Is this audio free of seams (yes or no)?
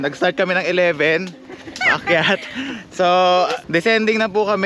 no